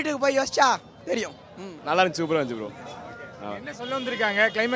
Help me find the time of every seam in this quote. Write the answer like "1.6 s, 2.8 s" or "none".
1.7 s